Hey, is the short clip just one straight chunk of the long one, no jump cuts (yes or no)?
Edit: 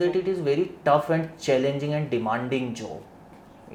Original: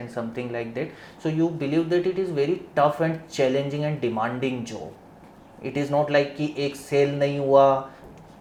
yes